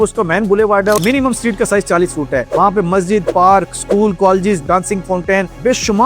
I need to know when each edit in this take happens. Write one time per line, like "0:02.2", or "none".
0:01.0
0:04.6

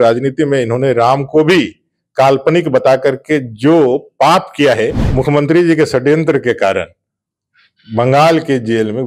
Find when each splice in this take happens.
0:05.0

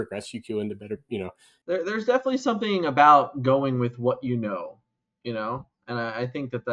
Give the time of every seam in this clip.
0:01.5

